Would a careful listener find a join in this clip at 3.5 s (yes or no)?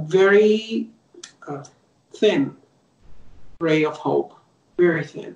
no